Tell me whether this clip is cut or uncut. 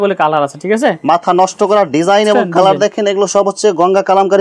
uncut